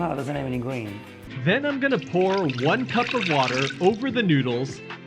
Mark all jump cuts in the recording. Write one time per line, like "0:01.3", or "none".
0:01.2